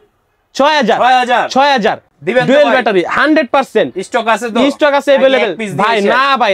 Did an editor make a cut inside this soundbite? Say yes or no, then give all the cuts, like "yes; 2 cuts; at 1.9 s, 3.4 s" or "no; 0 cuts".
no; 0 cuts